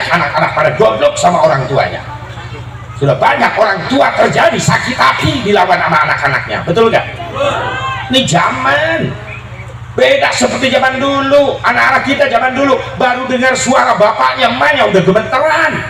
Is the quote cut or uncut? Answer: uncut